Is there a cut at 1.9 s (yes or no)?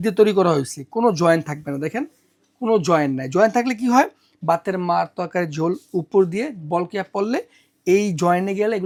no